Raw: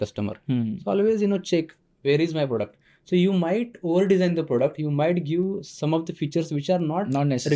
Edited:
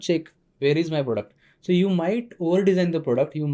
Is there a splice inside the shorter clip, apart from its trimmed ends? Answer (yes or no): no